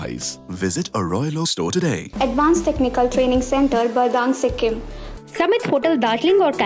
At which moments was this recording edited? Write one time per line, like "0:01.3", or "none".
0:02.1
0:05.0